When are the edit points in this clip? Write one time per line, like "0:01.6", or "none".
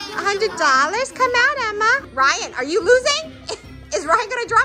0:02.1